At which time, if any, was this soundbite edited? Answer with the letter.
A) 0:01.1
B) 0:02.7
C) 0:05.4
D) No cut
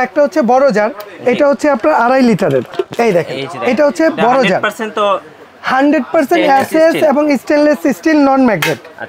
B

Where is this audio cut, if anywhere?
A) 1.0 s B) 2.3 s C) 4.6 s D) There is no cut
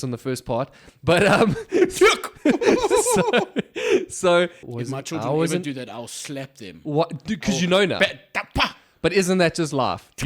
C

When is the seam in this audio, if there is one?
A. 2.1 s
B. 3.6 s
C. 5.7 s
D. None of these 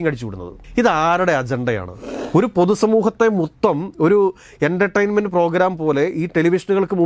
A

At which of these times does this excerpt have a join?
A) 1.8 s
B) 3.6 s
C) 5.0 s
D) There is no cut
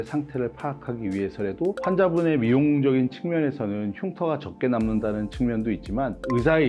A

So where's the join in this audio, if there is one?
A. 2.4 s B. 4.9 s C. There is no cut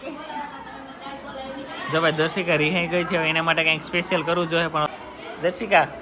B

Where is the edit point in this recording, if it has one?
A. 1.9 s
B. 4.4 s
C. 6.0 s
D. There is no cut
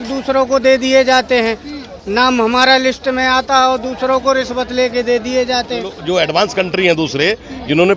C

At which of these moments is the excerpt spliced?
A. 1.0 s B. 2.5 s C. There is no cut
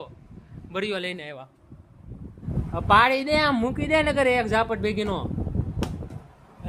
B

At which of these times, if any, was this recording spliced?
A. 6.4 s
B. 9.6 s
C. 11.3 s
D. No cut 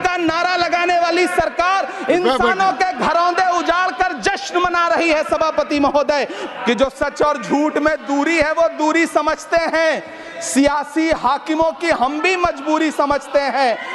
A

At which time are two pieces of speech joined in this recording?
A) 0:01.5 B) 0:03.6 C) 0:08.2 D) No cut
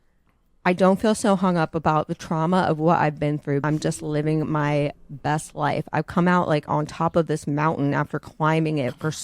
B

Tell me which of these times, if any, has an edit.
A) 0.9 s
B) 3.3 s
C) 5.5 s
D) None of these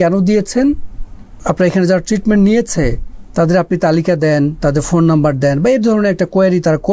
D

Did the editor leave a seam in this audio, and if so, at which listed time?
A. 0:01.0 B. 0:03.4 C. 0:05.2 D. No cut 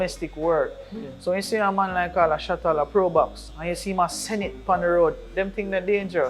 B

